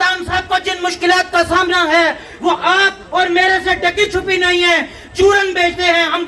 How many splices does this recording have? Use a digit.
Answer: 0